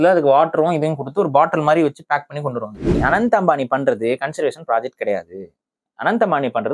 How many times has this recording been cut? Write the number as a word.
one